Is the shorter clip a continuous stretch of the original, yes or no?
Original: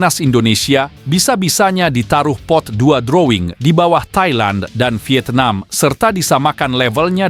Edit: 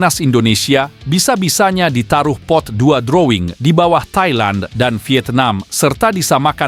yes